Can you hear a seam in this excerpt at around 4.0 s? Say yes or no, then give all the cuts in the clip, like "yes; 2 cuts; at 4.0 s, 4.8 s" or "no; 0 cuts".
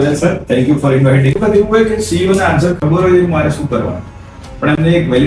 no; 1 cut; at 1.4 s